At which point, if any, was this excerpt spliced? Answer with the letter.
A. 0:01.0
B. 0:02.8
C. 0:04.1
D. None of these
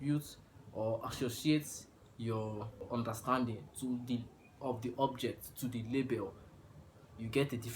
B